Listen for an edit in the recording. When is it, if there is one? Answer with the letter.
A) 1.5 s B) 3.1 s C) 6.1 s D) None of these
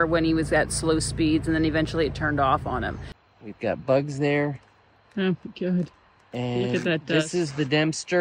B